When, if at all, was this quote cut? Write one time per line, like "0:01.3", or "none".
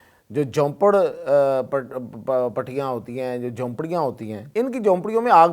0:04.4